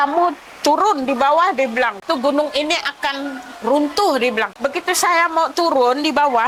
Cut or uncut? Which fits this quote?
cut